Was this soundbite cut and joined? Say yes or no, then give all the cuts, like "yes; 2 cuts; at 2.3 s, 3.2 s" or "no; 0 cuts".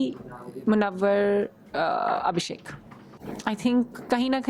yes; 1 cut; at 3.2 s